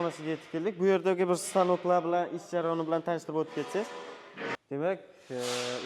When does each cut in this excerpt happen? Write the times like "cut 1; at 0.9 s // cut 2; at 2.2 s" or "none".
cut 1; at 4.6 s